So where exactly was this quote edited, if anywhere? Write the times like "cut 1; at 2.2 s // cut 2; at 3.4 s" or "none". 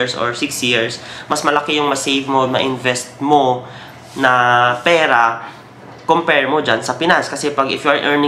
none